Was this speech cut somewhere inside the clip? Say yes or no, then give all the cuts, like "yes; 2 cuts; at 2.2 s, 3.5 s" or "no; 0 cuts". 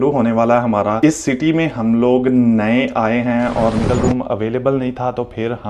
yes; 2 cuts; at 1.0 s, 3.8 s